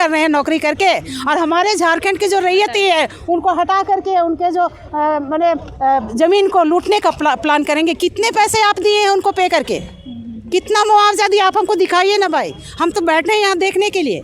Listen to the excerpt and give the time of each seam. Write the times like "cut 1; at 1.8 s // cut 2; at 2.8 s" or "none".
none